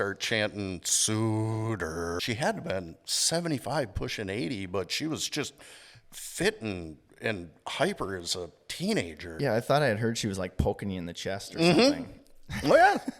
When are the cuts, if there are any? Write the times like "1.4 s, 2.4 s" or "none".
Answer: 2.2 s, 9.3 s